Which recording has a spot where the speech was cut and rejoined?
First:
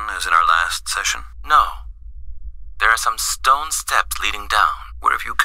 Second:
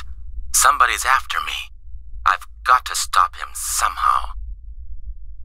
second; 1 cut; at 4.4 s

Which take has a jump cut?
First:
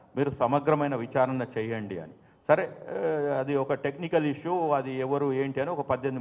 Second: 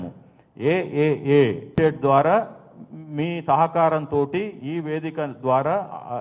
second; 1 cut; at 1.7 s

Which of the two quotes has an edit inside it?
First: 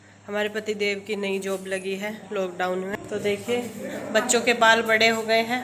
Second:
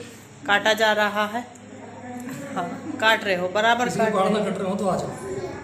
first; 1 cut; at 3.0 s

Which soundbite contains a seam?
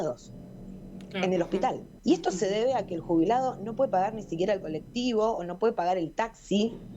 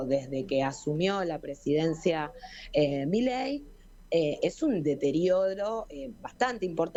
first; 1 cut; at 1.9 s

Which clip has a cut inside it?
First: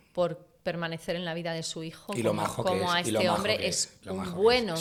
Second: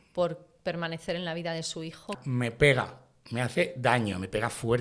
second; 1 cut; at 2.1 s

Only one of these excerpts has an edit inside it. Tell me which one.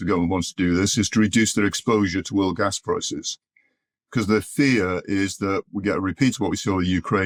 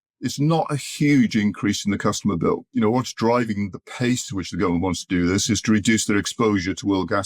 second; 1 cut; at 2.7 s

